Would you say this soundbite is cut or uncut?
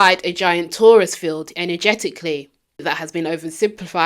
cut